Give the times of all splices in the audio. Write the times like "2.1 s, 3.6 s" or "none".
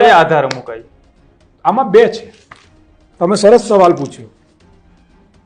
none